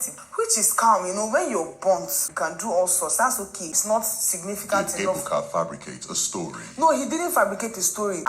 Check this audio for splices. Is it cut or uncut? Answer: uncut